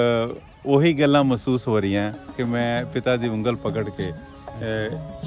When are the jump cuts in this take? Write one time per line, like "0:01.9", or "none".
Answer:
0:02.4